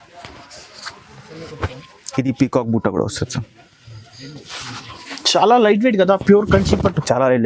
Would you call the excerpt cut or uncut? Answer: uncut